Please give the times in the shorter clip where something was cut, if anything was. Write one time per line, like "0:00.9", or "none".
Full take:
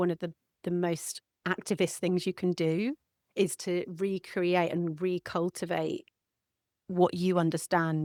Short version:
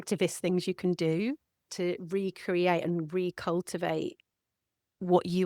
0:01.7

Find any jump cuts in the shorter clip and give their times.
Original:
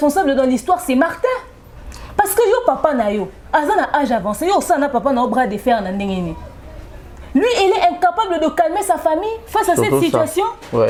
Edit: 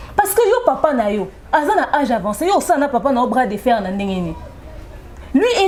none

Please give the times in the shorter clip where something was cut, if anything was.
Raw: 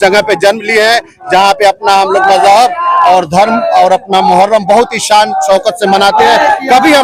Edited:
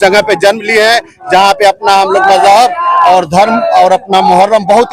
none

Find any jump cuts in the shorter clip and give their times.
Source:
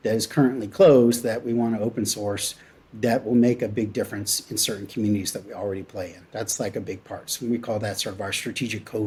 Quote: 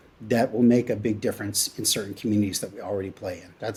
none

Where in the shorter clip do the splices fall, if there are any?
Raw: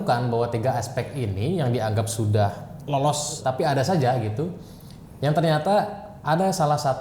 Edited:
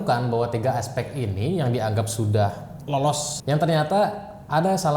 0:03.3

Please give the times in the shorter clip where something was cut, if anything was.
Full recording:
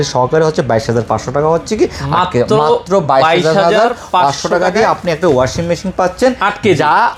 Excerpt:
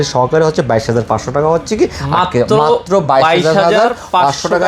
none

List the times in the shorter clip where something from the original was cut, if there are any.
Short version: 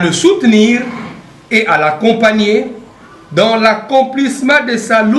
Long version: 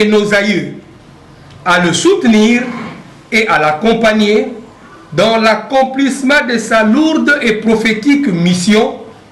none

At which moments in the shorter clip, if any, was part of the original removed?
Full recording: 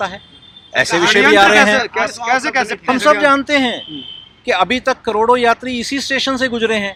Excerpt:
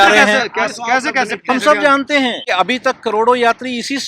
0:02.4

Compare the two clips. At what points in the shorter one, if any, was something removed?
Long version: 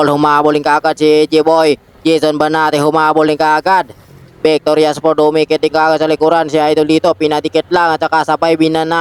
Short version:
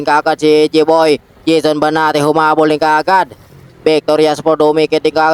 none

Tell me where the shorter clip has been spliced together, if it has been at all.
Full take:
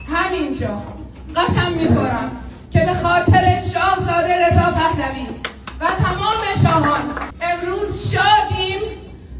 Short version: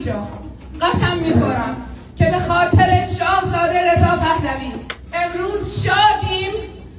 0:05.0

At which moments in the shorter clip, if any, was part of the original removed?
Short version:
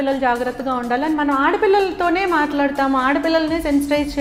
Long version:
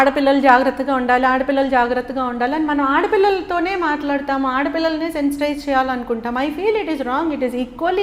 none

